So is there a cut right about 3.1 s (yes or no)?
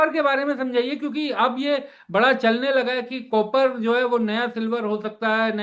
no